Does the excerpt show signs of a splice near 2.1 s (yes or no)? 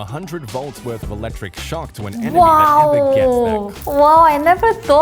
yes